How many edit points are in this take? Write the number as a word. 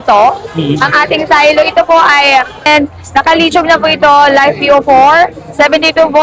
one